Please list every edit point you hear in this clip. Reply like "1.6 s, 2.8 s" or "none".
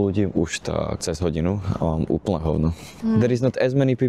1.0 s, 2.9 s